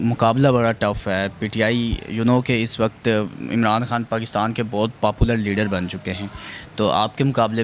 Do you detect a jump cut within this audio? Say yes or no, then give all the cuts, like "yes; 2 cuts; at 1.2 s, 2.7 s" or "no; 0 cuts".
no; 0 cuts